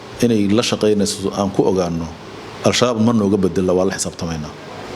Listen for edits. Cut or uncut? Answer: uncut